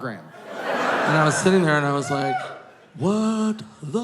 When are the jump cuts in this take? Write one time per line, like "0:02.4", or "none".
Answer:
0:01.1